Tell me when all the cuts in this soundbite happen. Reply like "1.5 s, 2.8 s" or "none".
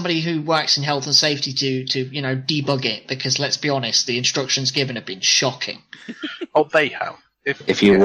none

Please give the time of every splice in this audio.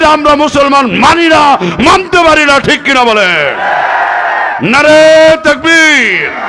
none

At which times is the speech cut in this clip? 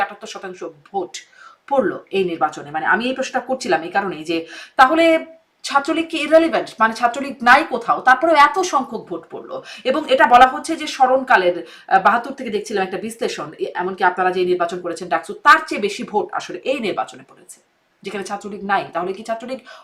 none

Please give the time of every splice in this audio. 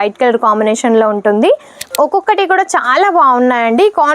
1.8 s

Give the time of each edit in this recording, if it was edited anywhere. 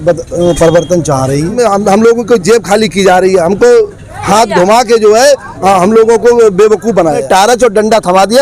1.5 s, 7.2 s

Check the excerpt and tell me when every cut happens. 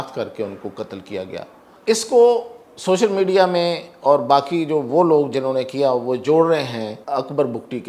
1.7 s, 7.0 s

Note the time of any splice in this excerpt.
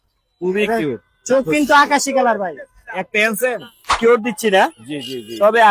4.0 s

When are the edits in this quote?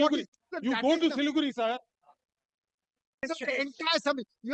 3.2 s

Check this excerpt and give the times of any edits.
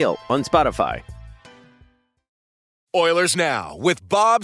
2.7 s

